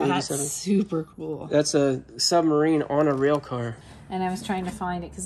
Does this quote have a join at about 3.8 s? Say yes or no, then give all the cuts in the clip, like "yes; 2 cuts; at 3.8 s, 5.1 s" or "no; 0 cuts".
yes; 1 cut; at 3.8 s